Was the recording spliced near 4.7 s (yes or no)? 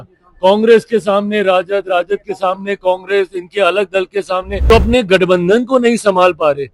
yes